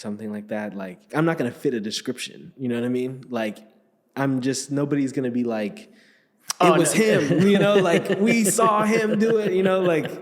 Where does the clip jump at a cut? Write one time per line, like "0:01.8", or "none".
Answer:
0:01.1